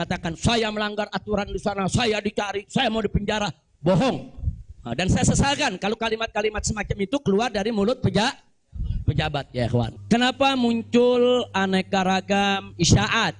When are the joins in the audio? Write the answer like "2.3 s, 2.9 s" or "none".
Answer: 9.9 s